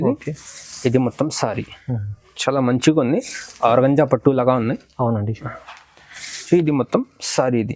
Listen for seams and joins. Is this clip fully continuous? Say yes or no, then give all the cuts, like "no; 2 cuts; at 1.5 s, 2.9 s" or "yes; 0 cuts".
no; 1 cut; at 6.5 s